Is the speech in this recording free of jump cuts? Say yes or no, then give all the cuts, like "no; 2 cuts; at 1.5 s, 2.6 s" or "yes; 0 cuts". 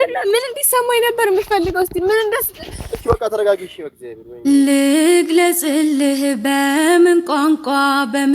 no; 1 cut; at 4.5 s